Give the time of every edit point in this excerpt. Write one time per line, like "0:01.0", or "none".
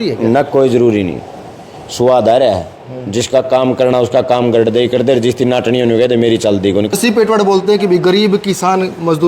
0:06.9